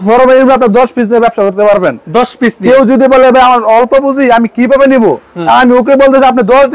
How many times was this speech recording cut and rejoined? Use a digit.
0